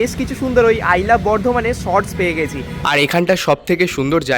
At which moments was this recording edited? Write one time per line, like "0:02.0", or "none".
0:02.7